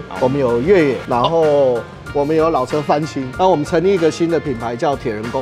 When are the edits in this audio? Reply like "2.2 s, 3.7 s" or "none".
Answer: none